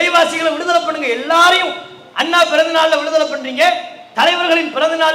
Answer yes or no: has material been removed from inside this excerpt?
no